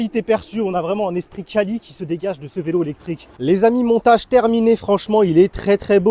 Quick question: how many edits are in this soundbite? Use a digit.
1